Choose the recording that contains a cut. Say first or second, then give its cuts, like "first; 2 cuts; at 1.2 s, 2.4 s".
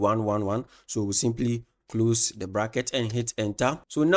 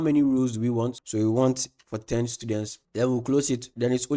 second; 2 cuts; at 1.0 s, 2.8 s